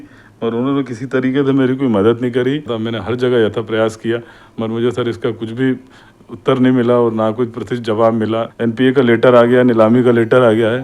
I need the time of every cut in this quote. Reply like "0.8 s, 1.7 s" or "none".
2.8 s, 8.5 s